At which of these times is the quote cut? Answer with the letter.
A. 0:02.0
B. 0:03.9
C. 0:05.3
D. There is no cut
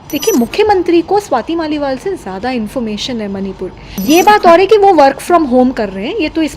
B